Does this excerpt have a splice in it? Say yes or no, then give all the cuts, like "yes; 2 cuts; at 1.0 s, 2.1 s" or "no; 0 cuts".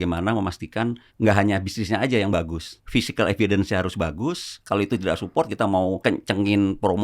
yes; 4 cuts; at 1.1 s, 2.8 s, 4.5 s, 6.0 s